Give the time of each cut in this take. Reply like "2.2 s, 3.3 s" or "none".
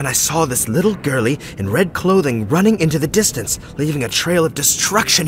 none